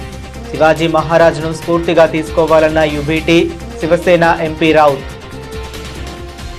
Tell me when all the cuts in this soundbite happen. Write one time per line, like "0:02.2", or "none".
none